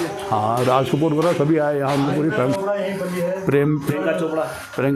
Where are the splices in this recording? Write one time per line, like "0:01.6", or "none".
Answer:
0:03.9